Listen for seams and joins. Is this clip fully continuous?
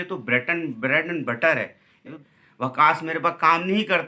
no; 1 cut; at 2.2 s

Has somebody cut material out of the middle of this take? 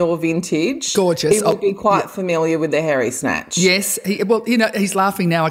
no; 0 cuts

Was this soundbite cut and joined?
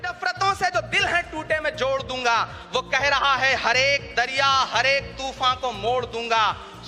no; 0 cuts

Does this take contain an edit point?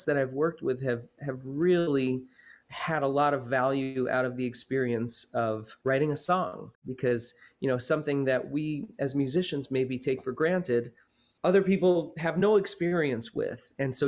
yes; 2 cuts; at 5.7 s, 6.8 s

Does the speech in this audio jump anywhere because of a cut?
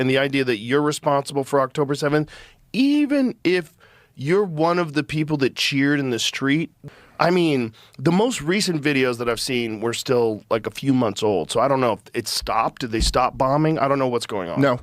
yes; 1 cut; at 6.7 s

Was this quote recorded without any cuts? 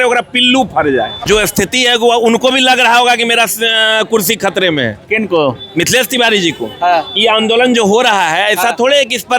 no; 1 cut; at 1.2 s

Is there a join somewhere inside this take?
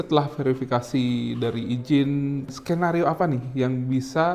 yes; 1 cut; at 2.5 s

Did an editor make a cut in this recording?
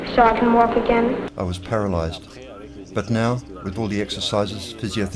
yes; 1 cut; at 1.3 s

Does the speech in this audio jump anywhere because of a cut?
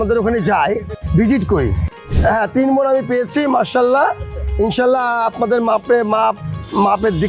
yes; 2 cuts; at 0.9 s, 2.0 s

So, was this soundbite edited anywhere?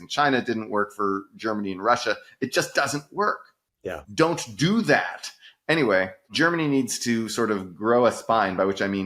no; 0 cuts

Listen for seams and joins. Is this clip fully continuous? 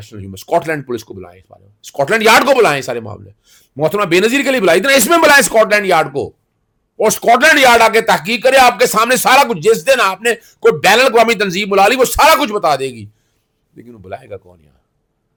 yes; 0 cuts

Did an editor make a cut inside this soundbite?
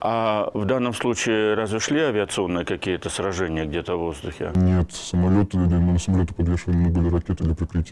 no; 0 cuts

